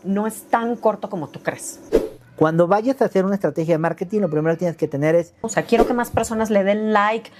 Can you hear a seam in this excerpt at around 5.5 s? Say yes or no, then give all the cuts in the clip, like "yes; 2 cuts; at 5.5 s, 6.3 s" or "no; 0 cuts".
yes; 2 cuts; at 1.8 s, 5.5 s